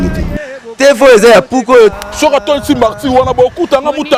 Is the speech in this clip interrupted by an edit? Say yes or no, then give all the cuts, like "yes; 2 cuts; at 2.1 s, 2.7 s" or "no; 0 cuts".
no; 0 cuts